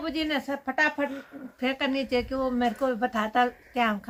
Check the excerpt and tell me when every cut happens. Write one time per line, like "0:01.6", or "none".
none

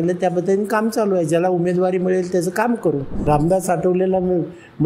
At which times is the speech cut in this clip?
0:03.1

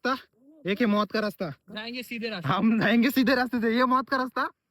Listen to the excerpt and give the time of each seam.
0:01.5

